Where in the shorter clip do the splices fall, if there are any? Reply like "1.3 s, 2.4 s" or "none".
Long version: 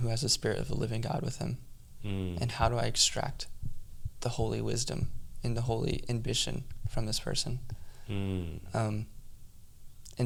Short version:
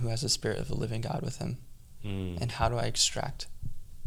none